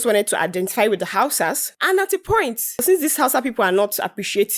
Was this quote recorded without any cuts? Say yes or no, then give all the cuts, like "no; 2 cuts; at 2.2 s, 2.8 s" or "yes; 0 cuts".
no; 2 cuts; at 1.7 s, 2.8 s